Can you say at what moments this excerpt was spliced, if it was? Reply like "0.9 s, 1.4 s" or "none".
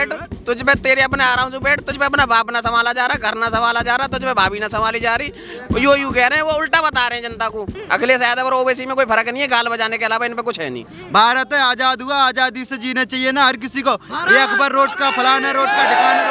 7.7 s, 10.9 s